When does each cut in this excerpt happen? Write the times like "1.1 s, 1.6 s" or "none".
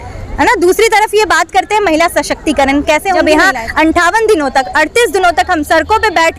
3.2 s